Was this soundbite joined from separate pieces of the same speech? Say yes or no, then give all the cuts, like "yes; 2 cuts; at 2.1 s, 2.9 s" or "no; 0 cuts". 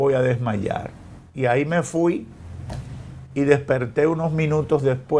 no; 0 cuts